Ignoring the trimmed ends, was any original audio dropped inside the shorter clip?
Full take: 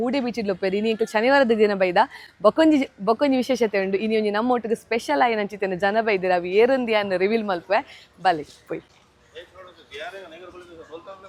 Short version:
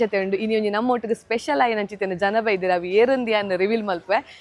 no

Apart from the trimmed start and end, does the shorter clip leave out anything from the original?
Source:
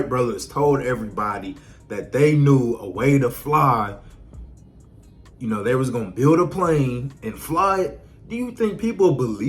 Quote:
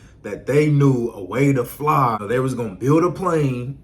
yes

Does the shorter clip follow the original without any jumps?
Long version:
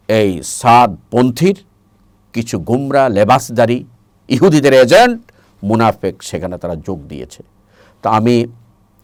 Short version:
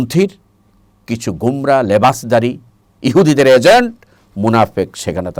yes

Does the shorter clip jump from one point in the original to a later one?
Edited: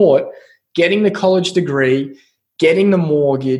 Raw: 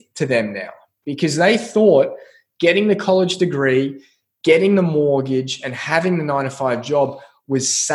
no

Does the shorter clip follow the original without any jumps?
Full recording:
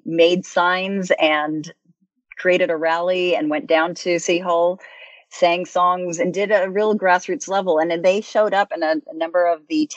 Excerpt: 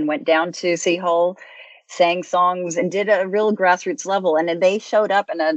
yes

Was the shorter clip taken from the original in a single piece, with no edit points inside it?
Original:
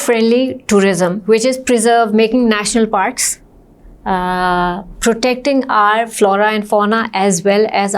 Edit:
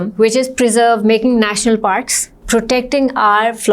no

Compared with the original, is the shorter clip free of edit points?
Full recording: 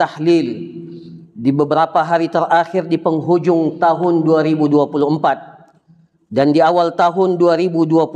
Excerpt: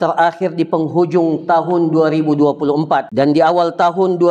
no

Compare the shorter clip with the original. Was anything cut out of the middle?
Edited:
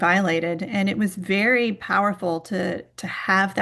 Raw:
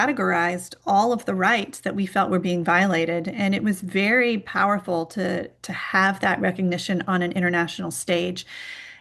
no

